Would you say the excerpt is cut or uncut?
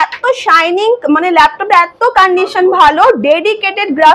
uncut